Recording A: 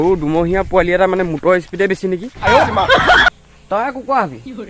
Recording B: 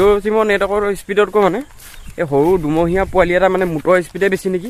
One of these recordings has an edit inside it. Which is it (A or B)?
A